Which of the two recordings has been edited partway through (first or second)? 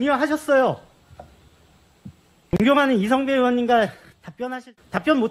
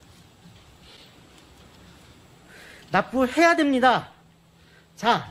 first